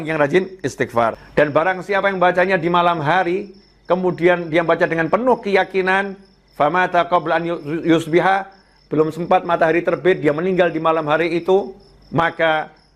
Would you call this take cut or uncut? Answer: cut